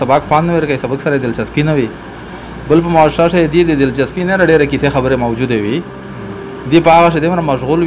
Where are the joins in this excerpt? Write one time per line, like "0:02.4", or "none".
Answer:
none